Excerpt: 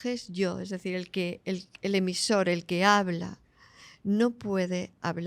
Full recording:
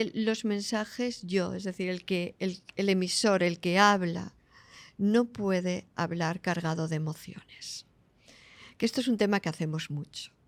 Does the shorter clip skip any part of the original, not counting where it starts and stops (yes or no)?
no